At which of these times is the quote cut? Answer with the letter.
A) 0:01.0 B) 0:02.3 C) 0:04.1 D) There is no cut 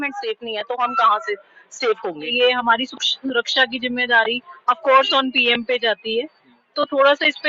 B